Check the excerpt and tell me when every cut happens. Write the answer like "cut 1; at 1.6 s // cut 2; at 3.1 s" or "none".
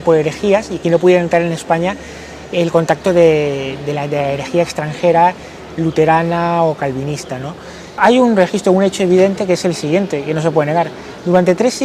cut 1; at 8.0 s